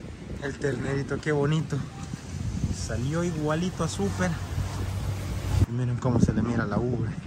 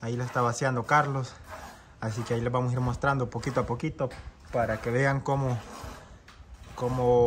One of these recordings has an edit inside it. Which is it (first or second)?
first